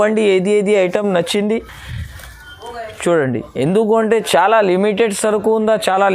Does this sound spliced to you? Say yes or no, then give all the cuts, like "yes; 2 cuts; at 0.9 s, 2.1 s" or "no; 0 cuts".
no; 0 cuts